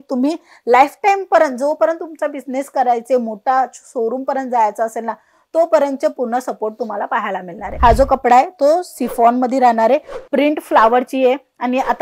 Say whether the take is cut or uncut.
cut